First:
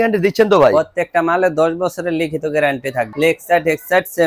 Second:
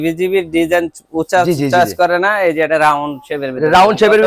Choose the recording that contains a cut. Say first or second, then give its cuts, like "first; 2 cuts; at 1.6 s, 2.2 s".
first; 1 cut; at 3.1 s